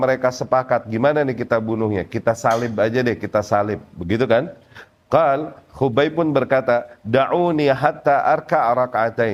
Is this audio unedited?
yes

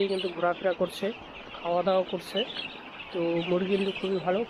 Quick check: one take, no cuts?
yes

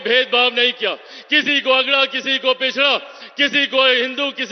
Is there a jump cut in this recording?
no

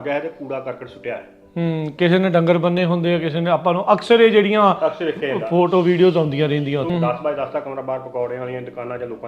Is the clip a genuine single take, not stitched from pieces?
no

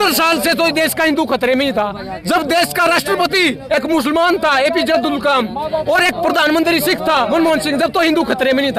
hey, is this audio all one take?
yes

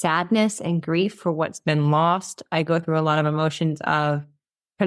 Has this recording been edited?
no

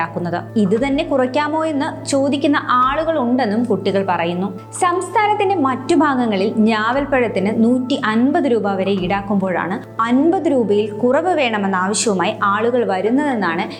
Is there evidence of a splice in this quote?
no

